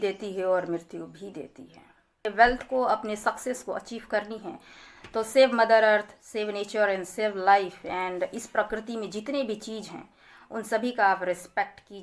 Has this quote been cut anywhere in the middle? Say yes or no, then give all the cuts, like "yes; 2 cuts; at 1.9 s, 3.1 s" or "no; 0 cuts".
yes; 1 cut; at 2.2 s